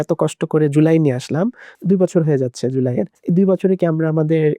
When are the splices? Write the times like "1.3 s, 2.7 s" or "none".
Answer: 1.7 s, 3.2 s